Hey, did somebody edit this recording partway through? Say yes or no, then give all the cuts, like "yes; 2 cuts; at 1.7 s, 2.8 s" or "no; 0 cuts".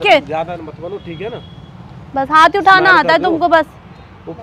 no; 0 cuts